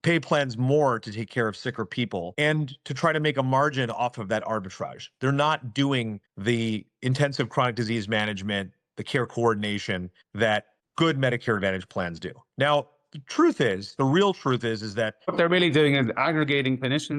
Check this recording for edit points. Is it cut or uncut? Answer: uncut